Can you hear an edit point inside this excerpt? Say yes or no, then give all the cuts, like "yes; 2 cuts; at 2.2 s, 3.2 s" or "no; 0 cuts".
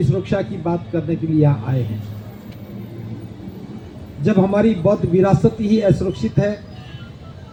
no; 0 cuts